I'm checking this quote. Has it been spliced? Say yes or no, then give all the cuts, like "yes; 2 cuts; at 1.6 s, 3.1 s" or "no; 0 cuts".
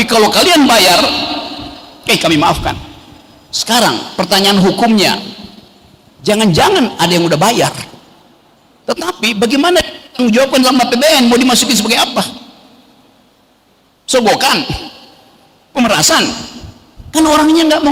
no; 0 cuts